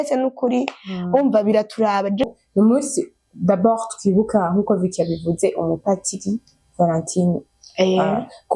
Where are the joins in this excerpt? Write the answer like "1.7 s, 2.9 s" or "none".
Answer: 2.3 s